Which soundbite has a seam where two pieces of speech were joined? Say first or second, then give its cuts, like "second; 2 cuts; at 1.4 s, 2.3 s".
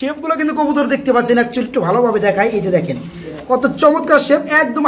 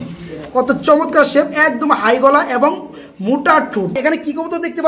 second; 1 cut; at 4.0 s